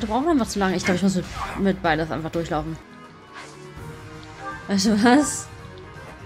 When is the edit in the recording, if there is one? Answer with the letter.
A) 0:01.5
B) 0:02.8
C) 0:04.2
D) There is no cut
B